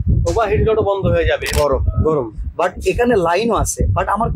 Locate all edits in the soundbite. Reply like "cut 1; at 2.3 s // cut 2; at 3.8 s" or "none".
cut 1; at 1.5 s